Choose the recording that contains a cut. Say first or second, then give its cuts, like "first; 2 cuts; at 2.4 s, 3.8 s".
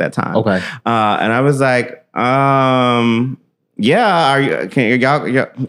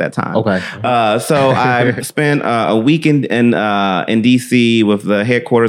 second; 2 cuts; at 0.8 s, 2.0 s